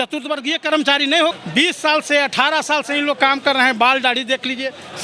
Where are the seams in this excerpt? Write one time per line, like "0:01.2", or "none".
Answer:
0:01.3